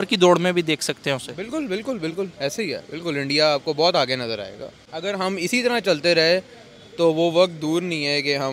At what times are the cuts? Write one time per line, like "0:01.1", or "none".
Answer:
0:04.9

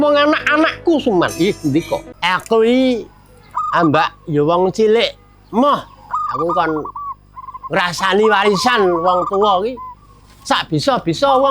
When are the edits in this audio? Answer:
0:02.1

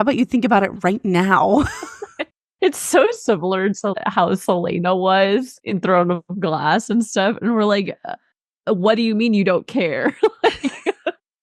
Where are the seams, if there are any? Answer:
0:04.0
0:05.6

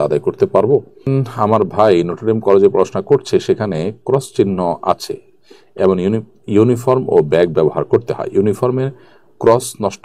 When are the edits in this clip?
0:00.9

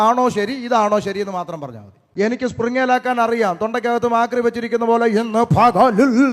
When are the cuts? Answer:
0:02.0

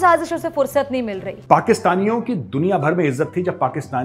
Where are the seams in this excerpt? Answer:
0:01.3

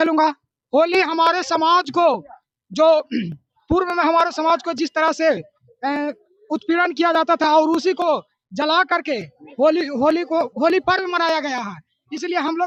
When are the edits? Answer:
none

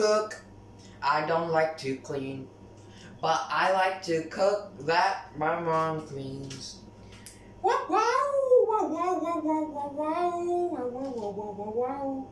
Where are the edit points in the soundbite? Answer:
none

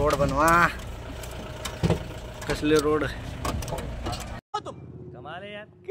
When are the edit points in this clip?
0:01.0
0:04.4

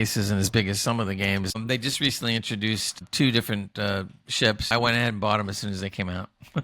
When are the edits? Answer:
0:01.6
0:03.0
0:04.7

